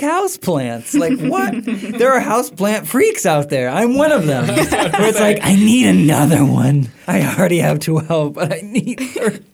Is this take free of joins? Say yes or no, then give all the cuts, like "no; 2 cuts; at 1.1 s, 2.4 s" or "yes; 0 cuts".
yes; 0 cuts